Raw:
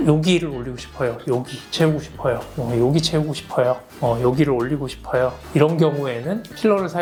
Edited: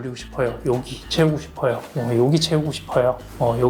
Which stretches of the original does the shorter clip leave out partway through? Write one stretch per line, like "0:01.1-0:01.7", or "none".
none

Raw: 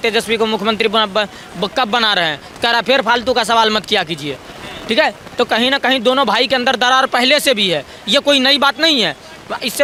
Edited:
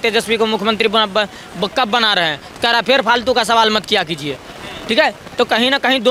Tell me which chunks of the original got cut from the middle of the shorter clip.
none

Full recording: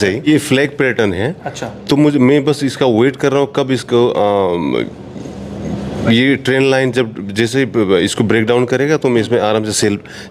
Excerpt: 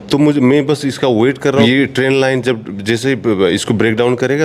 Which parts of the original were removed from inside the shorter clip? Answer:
0:03.4-0:06.1

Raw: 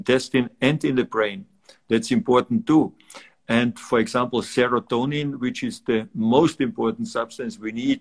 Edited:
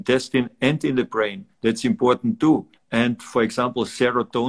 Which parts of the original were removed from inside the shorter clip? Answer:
0:01.4-0:01.7
0:03.0-0:03.3

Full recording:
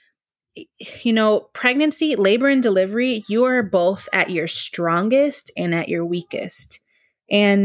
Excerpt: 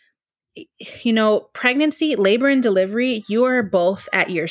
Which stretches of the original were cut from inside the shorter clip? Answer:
none

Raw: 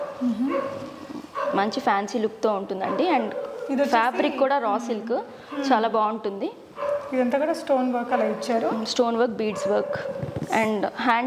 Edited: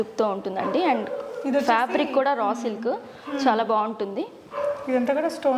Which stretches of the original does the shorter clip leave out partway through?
none

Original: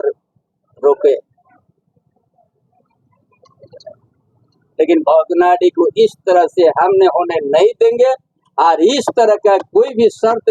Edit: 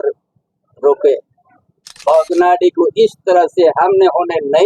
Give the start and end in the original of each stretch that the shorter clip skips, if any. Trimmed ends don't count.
0:02.0-0:05.0

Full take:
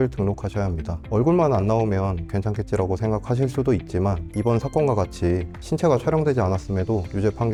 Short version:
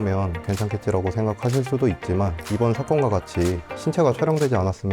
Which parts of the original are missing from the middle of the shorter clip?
none

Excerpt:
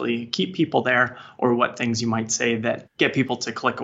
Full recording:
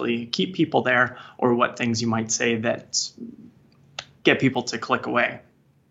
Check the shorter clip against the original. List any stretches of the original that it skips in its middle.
0:02.9-0:04.1

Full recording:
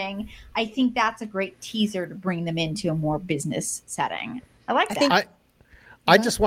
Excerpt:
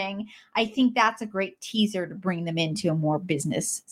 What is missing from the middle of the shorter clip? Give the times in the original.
none

